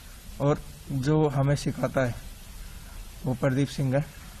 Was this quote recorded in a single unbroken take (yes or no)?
yes